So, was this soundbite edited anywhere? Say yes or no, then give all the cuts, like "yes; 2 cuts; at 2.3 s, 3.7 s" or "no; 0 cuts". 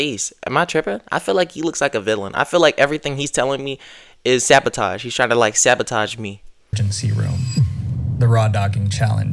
yes; 1 cut; at 6.6 s